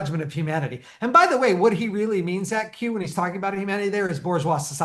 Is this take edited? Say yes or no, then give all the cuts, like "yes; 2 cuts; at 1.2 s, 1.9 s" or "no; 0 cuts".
no; 0 cuts